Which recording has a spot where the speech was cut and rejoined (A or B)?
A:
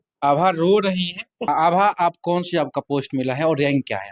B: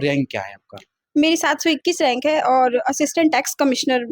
A